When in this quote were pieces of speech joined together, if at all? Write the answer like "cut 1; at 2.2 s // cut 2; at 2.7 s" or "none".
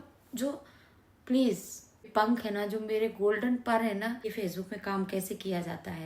cut 1; at 2.1 s // cut 2; at 4.2 s

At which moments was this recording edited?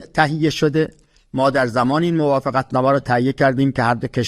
none

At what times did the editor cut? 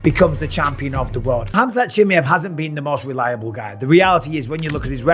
cut 1; at 1.5 s

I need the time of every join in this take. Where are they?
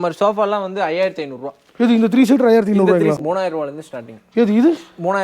cut 1; at 3.2 s

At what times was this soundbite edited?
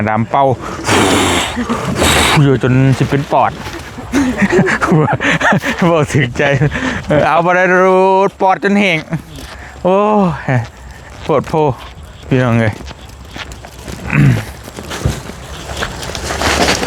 none

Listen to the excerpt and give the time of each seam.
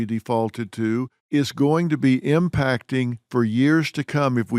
cut 1; at 1.2 s

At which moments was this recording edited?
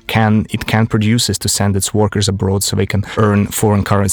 cut 1; at 3.0 s

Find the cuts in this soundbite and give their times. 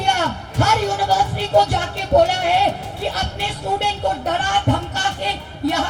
none

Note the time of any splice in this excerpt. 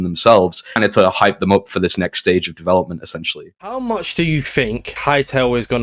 cut 1; at 3.4 s

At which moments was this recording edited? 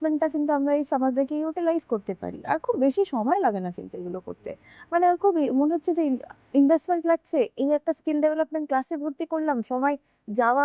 none

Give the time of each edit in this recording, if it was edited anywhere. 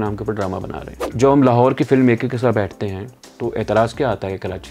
cut 1; at 1.1 s

